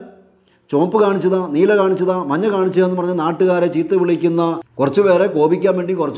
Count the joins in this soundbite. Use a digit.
1